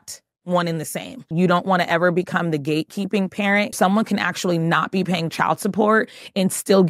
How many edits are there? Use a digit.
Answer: 2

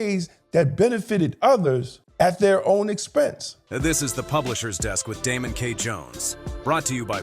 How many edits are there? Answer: 2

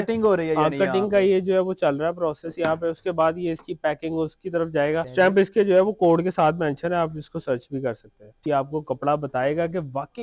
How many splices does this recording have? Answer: 2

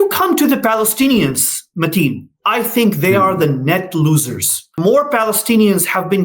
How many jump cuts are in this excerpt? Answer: 1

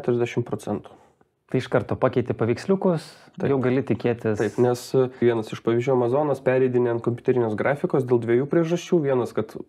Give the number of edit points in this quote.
0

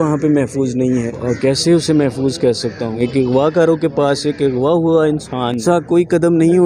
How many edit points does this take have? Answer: 3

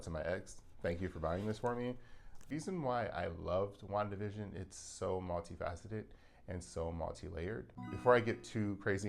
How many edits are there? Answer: 2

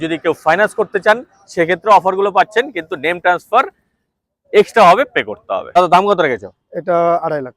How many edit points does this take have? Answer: 1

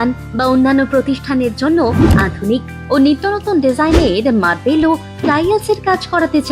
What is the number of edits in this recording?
0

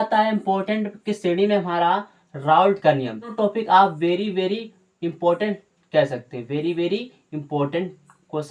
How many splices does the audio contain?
1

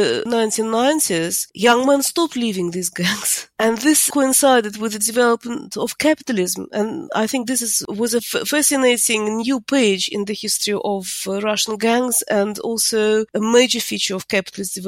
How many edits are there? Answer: 0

